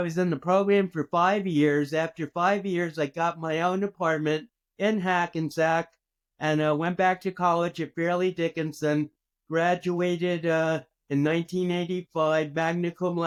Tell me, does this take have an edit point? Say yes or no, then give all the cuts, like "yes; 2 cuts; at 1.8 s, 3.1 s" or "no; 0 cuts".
no; 0 cuts